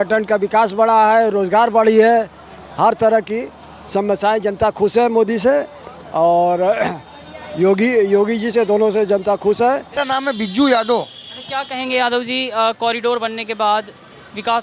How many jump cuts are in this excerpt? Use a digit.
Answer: 1